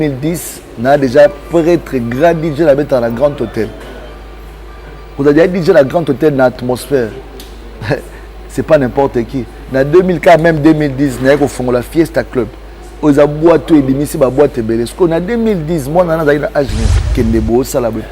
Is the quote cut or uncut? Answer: cut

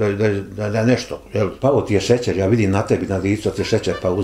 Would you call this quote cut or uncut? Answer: cut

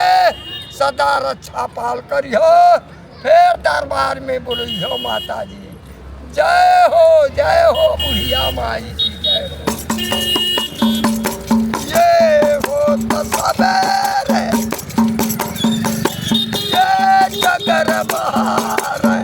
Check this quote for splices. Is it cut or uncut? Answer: uncut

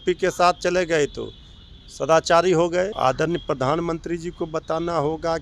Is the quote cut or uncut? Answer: cut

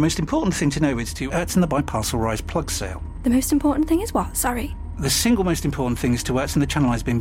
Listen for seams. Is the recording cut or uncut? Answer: uncut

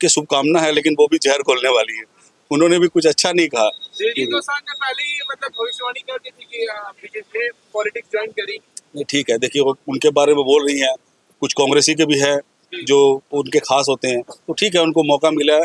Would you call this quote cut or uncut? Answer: uncut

